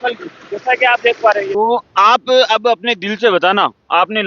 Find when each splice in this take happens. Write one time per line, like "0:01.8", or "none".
0:01.5